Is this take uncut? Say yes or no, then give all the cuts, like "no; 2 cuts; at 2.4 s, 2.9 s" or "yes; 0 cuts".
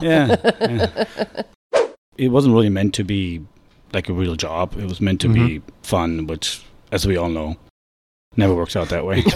no; 1 cut; at 1.8 s